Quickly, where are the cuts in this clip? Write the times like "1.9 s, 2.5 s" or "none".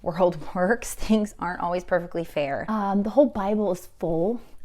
2.6 s